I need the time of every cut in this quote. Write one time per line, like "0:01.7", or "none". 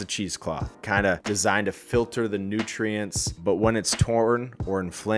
0:01.2

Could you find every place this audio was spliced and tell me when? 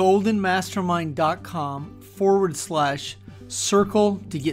none

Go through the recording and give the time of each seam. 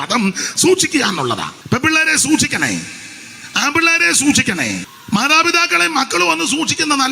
0:01.5
0:04.9

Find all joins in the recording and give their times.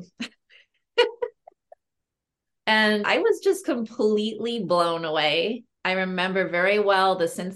none

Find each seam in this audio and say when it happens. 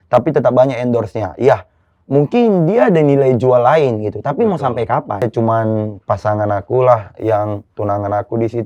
0:05.2

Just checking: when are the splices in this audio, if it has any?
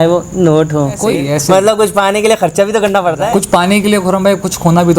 0:01.0
0:03.4

